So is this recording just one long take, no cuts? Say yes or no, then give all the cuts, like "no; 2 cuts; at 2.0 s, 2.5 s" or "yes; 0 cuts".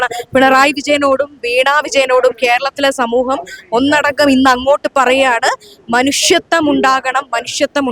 yes; 0 cuts